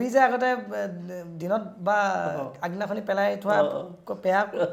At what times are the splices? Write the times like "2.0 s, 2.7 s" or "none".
none